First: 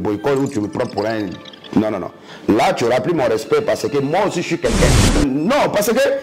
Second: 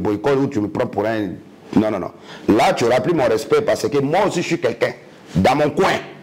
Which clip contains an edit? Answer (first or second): first